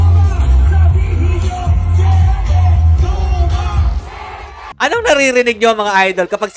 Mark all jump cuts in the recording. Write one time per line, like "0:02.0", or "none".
0:04.7